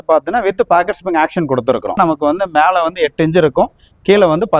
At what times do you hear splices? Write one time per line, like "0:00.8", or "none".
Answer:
0:02.0